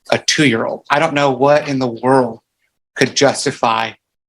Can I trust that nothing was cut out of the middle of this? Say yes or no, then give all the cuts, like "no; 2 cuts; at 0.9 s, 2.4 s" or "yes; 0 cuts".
no; 1 cut; at 2.0 s